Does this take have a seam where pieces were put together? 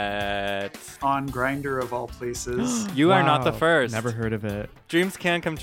yes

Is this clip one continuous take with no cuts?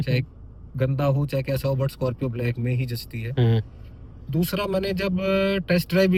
yes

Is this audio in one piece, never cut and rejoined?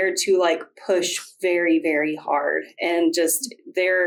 yes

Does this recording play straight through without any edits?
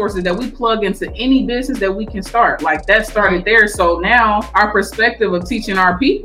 no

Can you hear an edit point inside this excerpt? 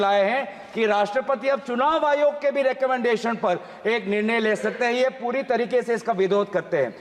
no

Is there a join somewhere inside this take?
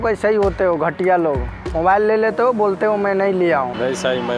no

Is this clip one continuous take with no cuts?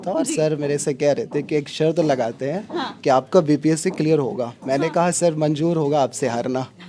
yes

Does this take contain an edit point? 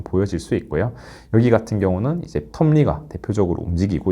no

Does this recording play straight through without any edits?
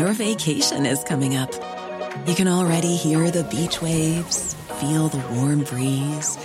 yes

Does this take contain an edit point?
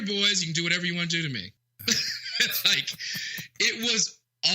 yes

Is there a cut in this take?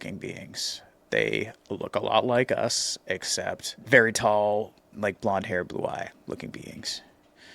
yes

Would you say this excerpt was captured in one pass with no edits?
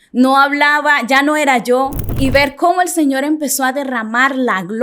no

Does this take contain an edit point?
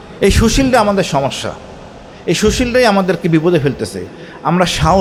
no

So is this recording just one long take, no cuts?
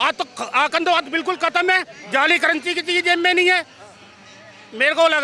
yes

